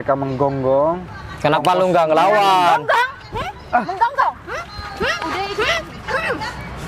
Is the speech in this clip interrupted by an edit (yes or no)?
no